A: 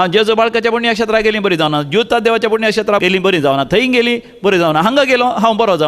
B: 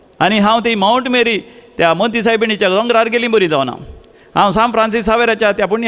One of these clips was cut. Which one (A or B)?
A